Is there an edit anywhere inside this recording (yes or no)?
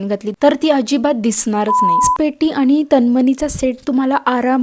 yes